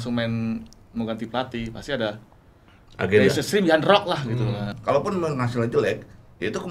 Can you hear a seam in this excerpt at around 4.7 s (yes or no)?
yes